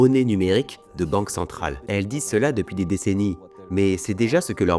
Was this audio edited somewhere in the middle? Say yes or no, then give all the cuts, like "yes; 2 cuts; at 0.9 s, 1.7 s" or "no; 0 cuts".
yes; 1 cut; at 1.8 s